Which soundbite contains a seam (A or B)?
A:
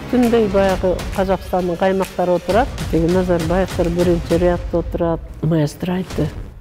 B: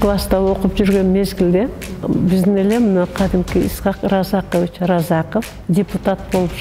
B